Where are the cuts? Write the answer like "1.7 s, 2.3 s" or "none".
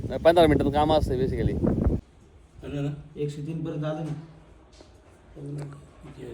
2.0 s